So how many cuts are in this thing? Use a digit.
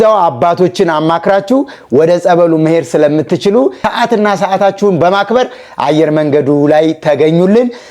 1